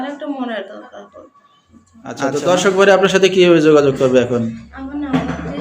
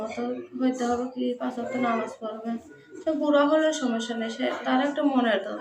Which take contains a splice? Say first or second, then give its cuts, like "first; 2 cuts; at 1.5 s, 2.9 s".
first; 1 cut; at 2.2 s